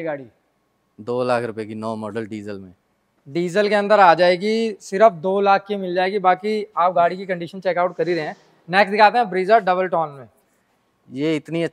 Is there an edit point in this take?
no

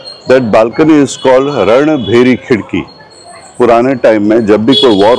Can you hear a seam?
no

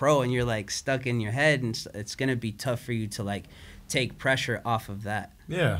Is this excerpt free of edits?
yes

